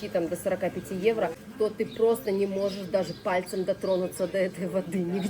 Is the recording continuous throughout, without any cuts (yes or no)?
no